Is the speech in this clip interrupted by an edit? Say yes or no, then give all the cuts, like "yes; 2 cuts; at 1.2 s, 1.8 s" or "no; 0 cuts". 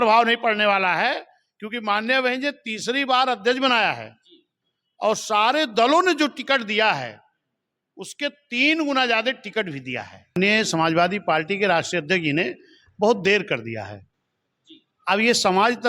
yes; 1 cut; at 10.3 s